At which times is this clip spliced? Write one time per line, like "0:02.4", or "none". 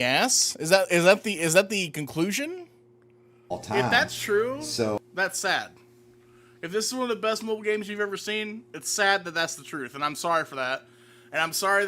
0:03.5